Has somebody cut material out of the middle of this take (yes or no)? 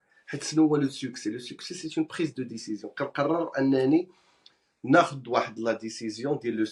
no